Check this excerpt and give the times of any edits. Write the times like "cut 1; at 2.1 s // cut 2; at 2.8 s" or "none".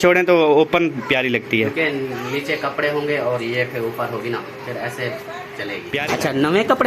cut 1; at 5.9 s